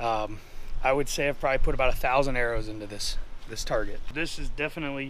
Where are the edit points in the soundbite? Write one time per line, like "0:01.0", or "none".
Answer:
0:04.0